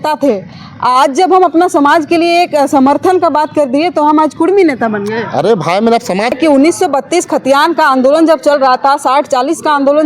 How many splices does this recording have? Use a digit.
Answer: 1